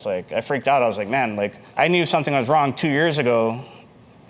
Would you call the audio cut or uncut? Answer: uncut